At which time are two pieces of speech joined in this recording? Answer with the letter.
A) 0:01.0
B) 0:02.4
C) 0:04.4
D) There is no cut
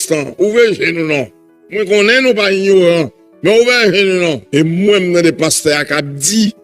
C